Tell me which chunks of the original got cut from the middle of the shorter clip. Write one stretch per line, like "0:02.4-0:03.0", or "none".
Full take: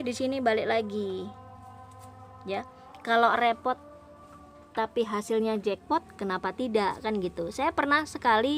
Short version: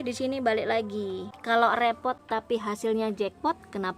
0:01.3-0:02.9
0:03.8-0:04.7